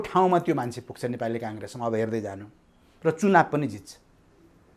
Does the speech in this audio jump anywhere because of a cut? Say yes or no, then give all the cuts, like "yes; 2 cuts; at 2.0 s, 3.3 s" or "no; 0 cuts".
no; 0 cuts